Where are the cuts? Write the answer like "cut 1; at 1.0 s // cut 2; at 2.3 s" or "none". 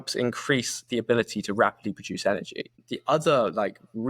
cut 1; at 2.9 s

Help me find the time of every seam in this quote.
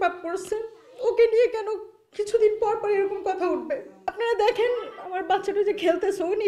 cut 1; at 4.0 s

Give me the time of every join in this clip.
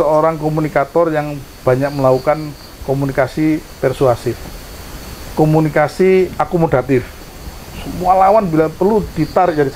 none

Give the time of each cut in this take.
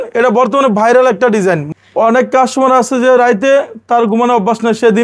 cut 1; at 1.6 s

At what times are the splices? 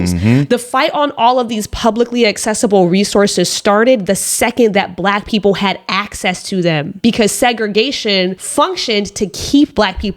cut 1; at 6.9 s // cut 2; at 8.4 s

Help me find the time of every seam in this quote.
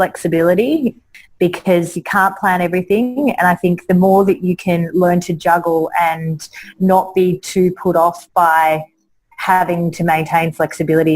cut 1; at 1.1 s

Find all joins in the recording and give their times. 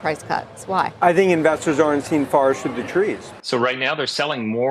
cut 1; at 3.3 s

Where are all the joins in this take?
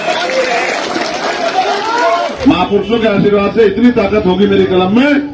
cut 1; at 2.3 s

